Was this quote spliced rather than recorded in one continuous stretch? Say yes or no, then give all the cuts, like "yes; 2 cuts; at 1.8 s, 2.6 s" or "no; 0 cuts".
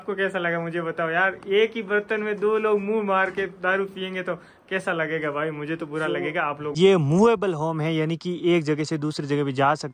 yes; 1 cut; at 6.8 s